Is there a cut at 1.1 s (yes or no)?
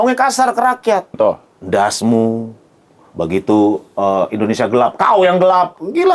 yes